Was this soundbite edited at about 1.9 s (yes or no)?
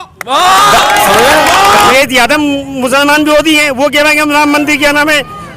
yes